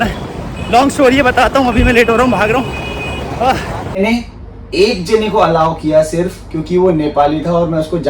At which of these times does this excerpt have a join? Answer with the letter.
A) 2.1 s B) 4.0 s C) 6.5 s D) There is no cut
B